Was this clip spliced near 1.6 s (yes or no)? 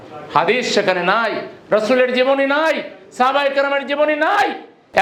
no